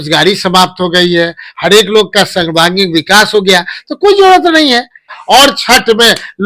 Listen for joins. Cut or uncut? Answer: cut